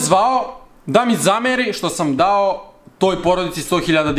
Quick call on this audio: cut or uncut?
uncut